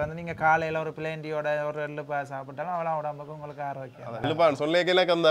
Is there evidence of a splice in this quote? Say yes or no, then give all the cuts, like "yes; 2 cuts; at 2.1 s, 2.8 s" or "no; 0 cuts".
yes; 1 cut; at 4.2 s